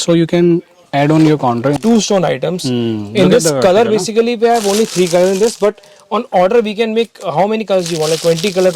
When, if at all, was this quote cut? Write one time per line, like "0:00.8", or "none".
0:01.8